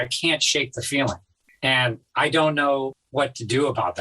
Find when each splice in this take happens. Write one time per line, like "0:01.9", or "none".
0:01.5
0:03.0